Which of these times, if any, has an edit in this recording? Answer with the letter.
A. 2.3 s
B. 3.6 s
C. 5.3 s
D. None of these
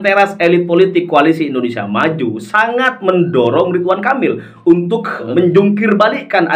C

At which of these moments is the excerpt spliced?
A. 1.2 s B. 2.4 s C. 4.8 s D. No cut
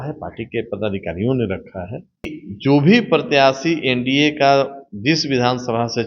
B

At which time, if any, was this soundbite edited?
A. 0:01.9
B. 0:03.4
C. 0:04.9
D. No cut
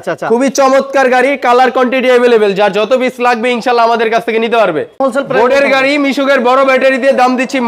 C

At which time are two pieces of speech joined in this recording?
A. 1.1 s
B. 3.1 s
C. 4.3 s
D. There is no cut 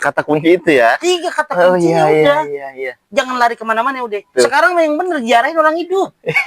C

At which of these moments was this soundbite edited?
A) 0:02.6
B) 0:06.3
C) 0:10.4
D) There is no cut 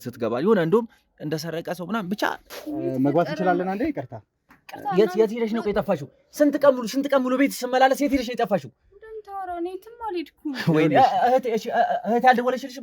A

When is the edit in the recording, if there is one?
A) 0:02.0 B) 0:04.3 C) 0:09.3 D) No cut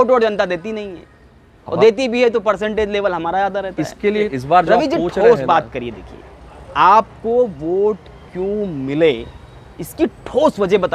B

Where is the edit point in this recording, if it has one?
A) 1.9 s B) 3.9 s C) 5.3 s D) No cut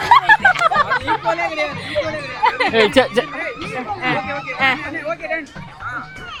D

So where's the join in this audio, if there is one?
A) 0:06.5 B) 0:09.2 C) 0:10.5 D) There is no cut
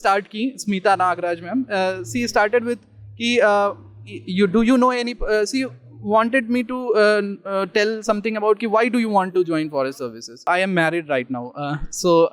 C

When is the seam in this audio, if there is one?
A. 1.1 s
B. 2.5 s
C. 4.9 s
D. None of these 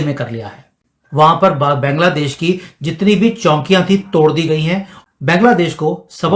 C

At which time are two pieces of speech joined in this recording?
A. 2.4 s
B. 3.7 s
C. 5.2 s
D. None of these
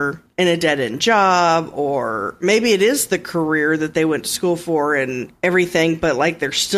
D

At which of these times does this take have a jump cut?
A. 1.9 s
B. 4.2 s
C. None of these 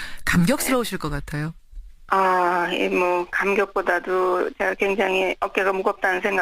C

